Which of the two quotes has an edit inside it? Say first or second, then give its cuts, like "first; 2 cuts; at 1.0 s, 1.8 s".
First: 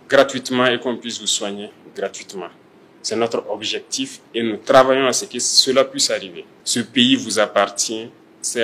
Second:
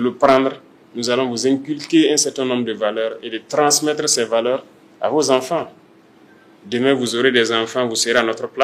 first; 1 cut; at 6.5 s